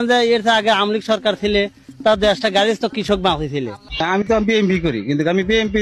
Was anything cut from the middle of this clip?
yes; 1 cut; at 3.8 s

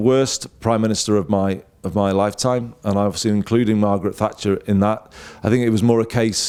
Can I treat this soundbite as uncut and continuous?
yes; 0 cuts

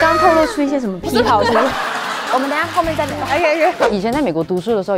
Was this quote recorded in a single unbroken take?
no; 2 cuts; at 2.3 s, 3.8 s

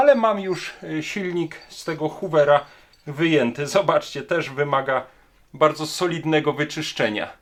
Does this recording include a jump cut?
no; 0 cuts

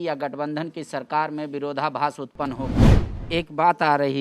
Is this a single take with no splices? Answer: no; 1 cut; at 2.9 s

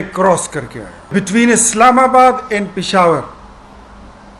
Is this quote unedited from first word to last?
no; 1 cut; at 1.1 s

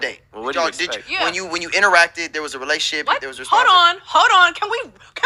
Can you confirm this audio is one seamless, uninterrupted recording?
yes; 0 cuts

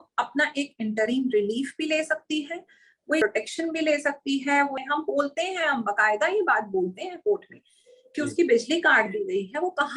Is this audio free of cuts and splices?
no; 2 cuts; at 3.2 s, 4.8 s

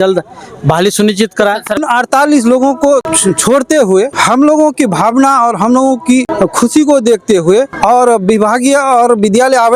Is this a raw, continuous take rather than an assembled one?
no; 5 cuts; at 1.8 s, 3.1 s, 4.1 s, 6.3 s, 7.7 s

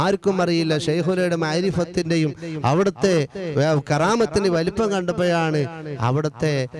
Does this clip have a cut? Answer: no; 0 cuts

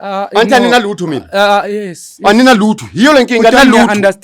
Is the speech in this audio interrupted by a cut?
no; 0 cuts

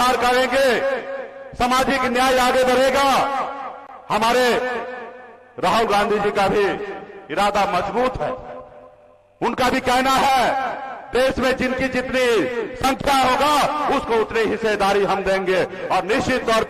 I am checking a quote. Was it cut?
no; 0 cuts

